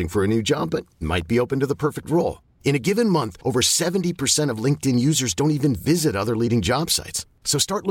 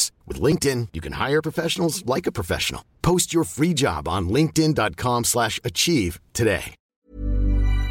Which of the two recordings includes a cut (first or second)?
second